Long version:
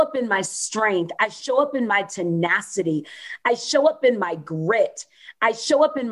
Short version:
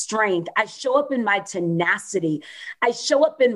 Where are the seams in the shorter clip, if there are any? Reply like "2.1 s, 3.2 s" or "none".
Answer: none